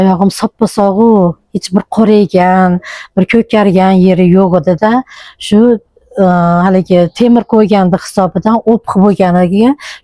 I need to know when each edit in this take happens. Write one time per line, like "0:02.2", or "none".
none